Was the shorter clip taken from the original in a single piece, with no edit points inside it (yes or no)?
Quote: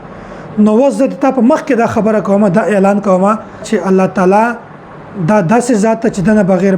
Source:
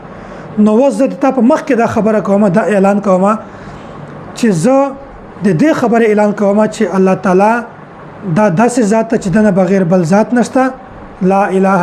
no